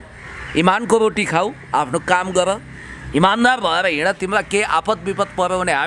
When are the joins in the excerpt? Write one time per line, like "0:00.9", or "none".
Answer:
none